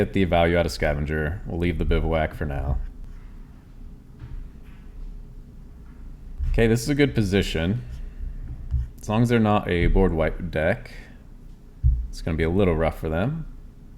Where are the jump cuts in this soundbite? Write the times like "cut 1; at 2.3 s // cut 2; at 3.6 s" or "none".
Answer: cut 1; at 3.1 s // cut 2; at 6.4 s